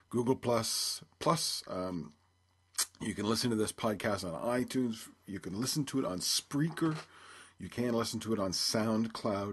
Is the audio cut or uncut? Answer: cut